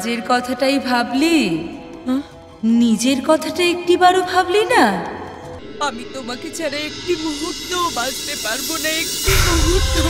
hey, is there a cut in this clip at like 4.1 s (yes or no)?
no